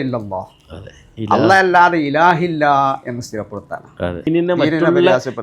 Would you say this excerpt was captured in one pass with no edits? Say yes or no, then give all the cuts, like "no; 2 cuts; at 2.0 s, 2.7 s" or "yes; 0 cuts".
no; 1 cut; at 4.3 s